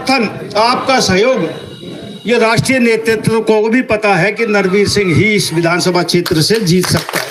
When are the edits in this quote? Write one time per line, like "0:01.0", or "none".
none